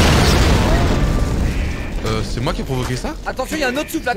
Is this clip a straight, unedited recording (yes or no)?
yes